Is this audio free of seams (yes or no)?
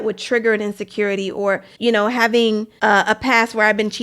no